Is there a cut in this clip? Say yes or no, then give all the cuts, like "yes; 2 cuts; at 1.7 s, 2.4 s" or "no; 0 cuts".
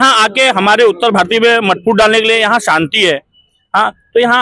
no; 0 cuts